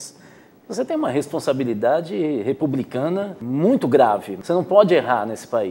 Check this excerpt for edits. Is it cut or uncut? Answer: cut